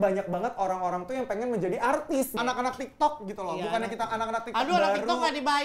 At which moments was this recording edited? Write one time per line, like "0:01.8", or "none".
0:02.3